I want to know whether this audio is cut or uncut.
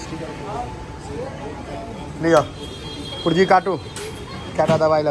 uncut